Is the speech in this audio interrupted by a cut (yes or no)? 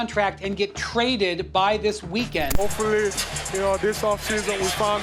yes